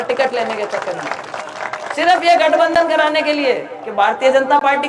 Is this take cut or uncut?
cut